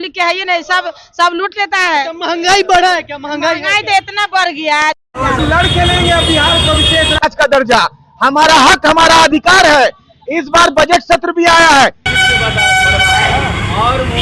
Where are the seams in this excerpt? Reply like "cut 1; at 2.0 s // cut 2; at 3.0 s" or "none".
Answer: cut 1; at 5.4 s // cut 2; at 12.1 s